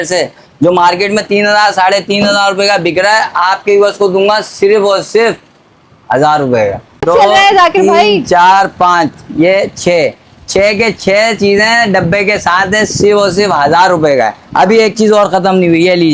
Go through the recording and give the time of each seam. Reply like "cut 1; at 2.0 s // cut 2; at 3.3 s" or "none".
cut 1; at 7.0 s